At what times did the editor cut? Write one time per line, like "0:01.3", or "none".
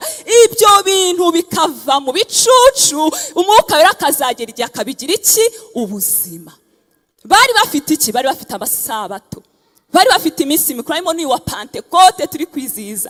none